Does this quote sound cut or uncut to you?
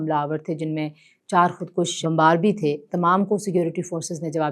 cut